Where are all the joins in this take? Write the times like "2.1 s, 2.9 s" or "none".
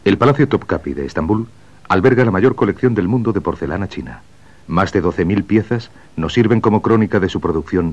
2.7 s